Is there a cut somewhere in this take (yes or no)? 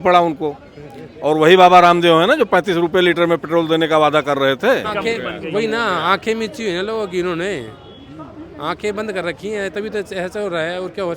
yes